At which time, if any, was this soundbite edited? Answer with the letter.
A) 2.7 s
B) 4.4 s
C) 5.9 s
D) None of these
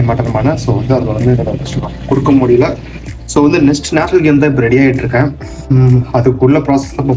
D